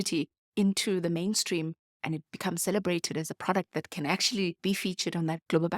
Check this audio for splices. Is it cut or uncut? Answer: cut